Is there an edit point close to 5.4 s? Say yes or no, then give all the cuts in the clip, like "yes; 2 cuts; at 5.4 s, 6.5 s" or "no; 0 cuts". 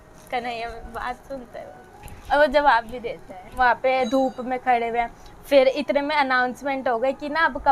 no; 1 cut; at 3.5 s